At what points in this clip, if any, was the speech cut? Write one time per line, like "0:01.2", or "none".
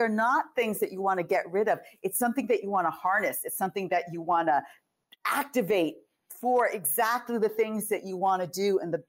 none